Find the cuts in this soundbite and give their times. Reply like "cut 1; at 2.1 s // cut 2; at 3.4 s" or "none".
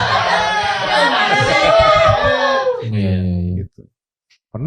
cut 1; at 2.9 s